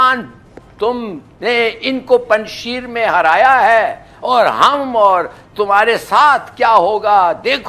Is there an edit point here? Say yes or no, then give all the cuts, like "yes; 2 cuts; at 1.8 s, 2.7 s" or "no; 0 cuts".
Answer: no; 0 cuts